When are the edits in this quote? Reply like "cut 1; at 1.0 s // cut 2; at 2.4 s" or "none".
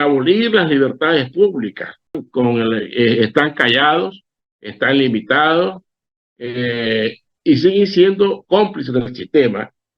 cut 1; at 2.2 s